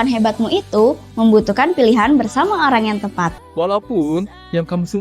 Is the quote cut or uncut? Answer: cut